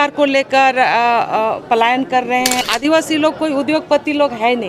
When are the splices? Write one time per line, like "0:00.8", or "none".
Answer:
0:02.6